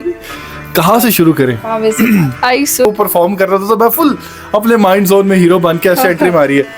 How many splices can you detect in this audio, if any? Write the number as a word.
one